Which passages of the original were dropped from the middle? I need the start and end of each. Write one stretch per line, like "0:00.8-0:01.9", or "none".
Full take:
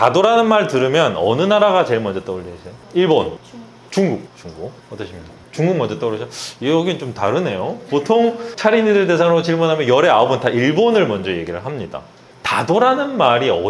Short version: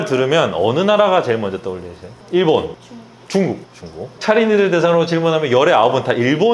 0:04.7-0:08.5